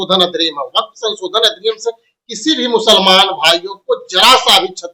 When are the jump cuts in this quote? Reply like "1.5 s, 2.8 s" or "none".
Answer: none